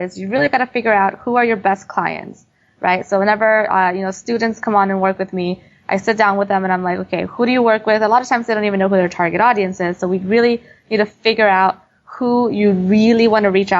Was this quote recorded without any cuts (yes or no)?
yes